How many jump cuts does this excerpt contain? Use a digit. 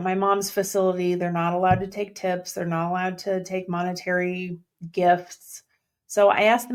0